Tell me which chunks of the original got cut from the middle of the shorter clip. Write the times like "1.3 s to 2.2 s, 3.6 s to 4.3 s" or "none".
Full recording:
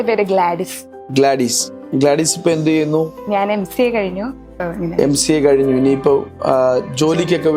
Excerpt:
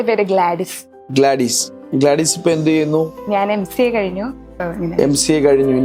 none